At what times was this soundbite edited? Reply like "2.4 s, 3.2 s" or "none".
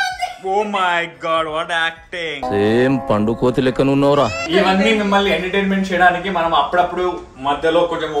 none